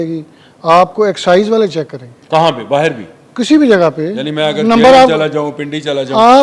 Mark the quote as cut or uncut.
uncut